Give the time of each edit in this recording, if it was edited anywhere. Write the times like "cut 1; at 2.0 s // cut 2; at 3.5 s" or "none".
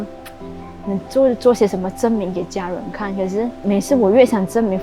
none